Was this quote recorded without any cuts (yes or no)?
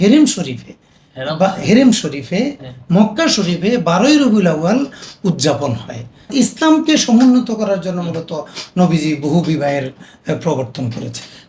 no